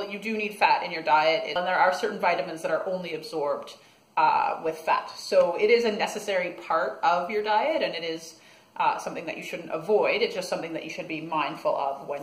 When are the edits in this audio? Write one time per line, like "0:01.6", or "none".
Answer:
0:01.6